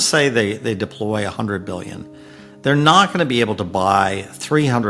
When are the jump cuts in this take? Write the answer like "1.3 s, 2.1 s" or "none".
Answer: none